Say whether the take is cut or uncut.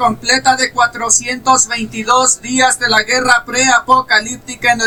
uncut